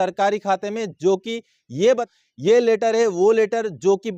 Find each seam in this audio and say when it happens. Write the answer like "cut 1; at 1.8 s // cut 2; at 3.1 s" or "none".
cut 1; at 2.0 s